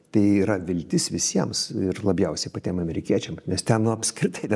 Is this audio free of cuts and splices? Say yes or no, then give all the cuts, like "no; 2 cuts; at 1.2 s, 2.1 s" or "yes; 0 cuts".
yes; 0 cuts